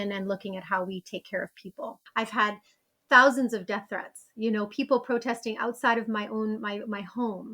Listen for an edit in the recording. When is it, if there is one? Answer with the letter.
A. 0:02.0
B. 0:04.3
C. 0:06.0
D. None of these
A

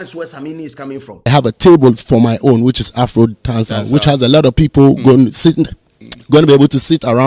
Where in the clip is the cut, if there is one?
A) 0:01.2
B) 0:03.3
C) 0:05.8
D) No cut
A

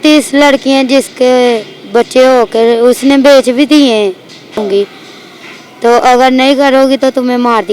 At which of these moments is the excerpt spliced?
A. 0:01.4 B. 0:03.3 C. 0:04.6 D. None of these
C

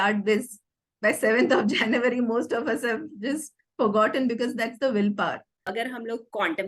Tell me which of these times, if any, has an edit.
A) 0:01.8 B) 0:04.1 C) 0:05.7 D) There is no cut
C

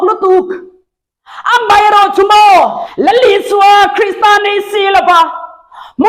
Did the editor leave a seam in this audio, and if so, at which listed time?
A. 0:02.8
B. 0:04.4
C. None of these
A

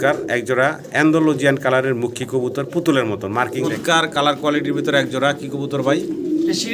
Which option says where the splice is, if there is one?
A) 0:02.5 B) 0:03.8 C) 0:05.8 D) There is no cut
B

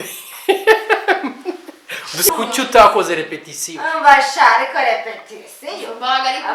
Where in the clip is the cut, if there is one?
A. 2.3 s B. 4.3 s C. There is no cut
A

